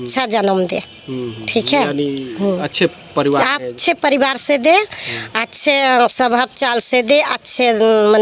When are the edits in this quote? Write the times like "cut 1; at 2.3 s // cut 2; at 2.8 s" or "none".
none